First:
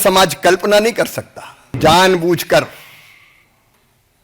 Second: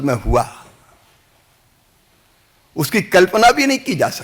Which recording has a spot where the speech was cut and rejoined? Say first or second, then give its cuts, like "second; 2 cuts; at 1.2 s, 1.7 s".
first; 1 cut; at 1.8 s